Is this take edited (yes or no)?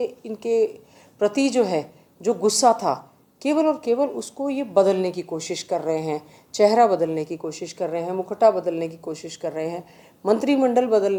no